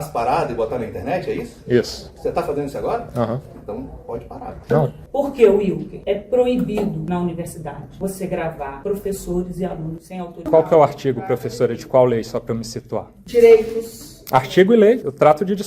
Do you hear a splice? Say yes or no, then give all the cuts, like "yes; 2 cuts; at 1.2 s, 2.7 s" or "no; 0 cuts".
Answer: yes; 2 cuts; at 5.0 s, 10.4 s